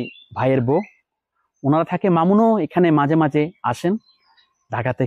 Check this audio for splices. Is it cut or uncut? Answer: uncut